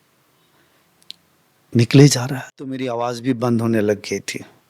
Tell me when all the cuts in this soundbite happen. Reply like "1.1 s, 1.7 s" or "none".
2.8 s